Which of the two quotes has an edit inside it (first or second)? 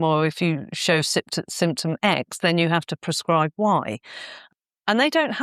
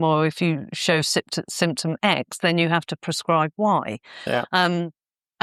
first